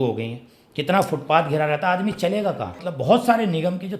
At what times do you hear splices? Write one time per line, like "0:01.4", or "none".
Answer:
0:02.8

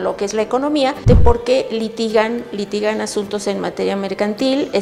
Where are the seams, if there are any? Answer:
0:01.0

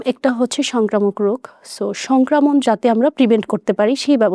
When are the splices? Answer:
none

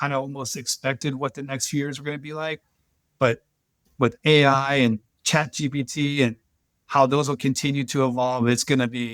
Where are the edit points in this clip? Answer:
none

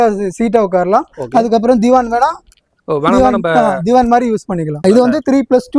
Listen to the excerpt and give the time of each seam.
0:04.8

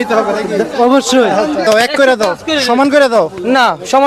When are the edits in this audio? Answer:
0:01.6

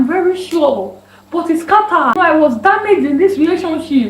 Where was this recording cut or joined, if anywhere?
0:02.1

